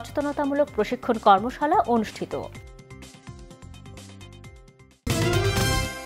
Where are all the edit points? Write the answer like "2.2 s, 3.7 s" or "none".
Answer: 5.0 s